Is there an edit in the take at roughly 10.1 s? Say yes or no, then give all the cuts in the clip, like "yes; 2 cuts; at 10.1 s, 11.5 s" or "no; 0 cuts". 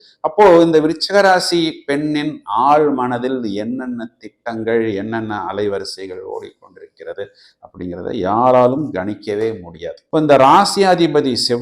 no; 0 cuts